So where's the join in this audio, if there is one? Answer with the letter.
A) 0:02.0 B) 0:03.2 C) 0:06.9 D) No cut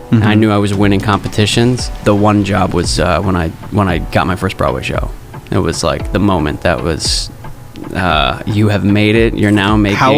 A